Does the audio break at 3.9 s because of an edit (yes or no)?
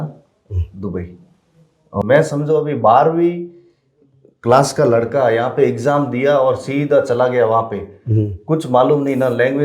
no